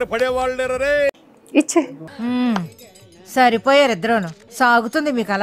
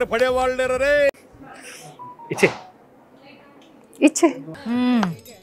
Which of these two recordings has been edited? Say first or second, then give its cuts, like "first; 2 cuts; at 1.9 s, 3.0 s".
first; 1 cut; at 1.3 s